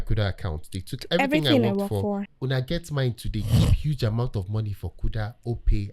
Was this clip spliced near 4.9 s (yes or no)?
no